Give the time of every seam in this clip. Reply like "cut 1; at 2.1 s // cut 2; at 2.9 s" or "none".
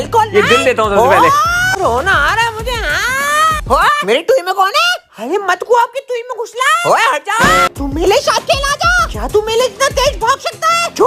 cut 1; at 1.6 s // cut 2; at 7.7 s

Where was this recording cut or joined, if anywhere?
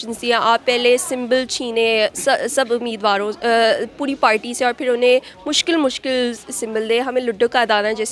none

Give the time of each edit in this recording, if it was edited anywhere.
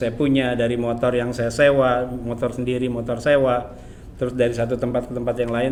none

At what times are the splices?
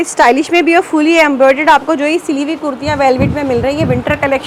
none

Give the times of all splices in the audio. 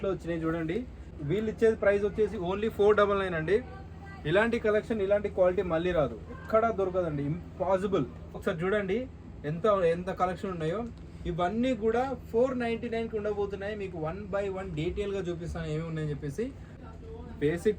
cut 1; at 1.2 s // cut 2; at 8.4 s // cut 3; at 16.7 s

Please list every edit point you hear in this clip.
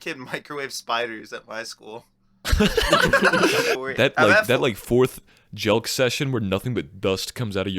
cut 1; at 3.8 s

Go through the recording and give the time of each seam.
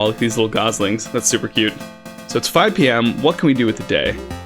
cut 1; at 2.2 s

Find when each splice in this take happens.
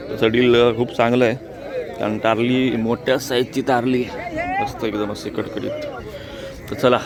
none

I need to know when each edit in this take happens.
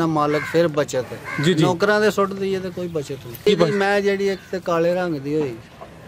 cut 1; at 3.4 s

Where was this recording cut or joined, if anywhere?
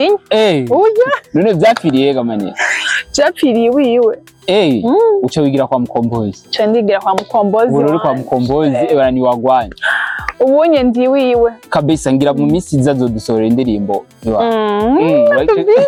none

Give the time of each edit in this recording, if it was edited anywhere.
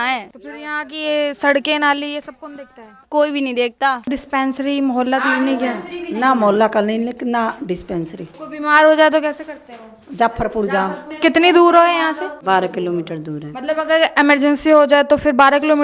cut 1; at 4.0 s // cut 2; at 12.4 s

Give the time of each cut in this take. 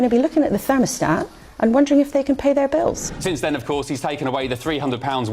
cut 1; at 3.1 s

